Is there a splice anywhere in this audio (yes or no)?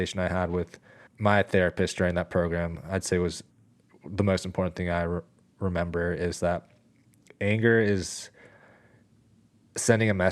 yes